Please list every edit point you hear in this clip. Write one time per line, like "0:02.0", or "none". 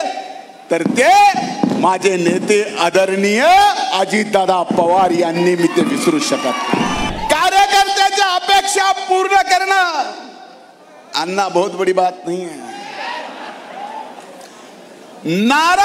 0:07.1

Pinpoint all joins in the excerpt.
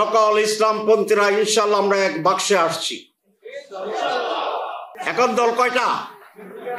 0:04.9

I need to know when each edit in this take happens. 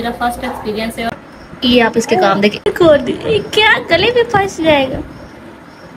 0:01.1
0:02.7

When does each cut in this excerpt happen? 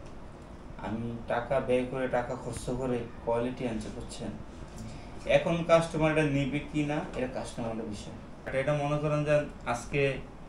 0:08.5

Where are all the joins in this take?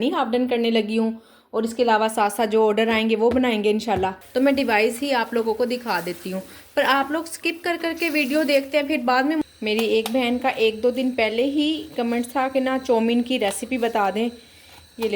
0:04.2
0:09.4

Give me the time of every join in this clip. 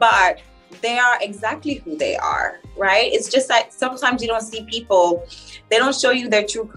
none

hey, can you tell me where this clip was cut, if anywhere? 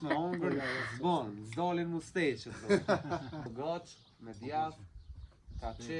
0:03.5

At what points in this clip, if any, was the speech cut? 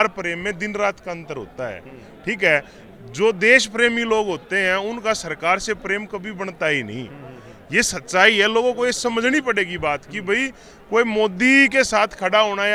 none

